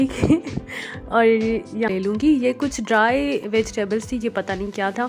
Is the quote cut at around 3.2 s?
no; 1 cut; at 1.9 s

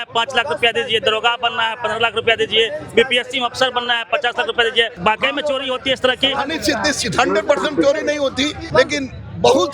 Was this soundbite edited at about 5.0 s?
yes; 2 cuts; at 5.0 s, 8.6 s

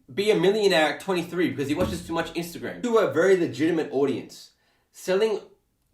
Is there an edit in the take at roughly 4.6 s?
no; 1 cut; at 2.7 s

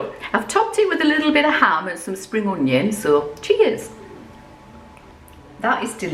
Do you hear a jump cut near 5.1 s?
yes; 1 cut; at 5.1 s

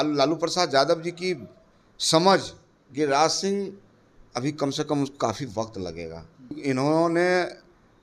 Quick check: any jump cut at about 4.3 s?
no; 1 cut; at 6.6 s

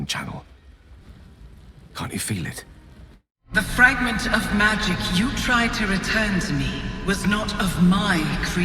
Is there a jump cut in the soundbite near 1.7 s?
no; 1 cut; at 3.4 s

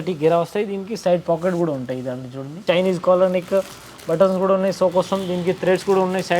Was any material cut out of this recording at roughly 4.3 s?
no; 1 cut; at 2.6 s

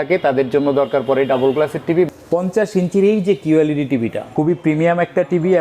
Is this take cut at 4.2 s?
yes; 2 cuts; at 2.1 s, 4.2 s

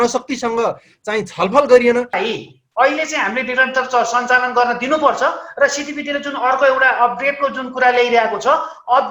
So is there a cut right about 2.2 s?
yes; 1 cut; at 2.2 s

